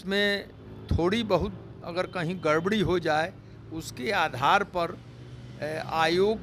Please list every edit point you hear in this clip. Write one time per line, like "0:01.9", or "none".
none